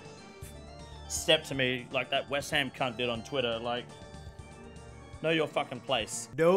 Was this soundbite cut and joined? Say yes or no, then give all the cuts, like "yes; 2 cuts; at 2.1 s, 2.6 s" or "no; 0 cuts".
no; 0 cuts